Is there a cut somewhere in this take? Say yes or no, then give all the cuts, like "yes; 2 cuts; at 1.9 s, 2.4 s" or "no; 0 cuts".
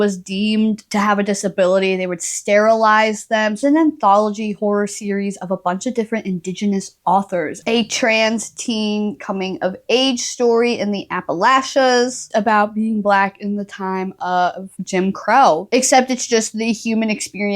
yes; 4 cuts; at 3.6 s, 7.6 s, 12.2 s, 15.7 s